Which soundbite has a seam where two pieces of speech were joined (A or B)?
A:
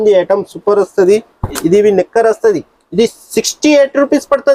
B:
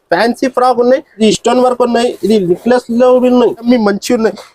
B